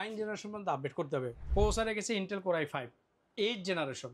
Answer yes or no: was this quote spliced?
yes